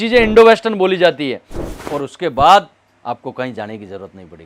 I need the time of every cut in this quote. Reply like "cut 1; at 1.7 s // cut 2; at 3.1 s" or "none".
cut 1; at 1.7 s